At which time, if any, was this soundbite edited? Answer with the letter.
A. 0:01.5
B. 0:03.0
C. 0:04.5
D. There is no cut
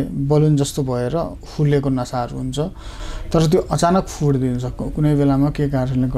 B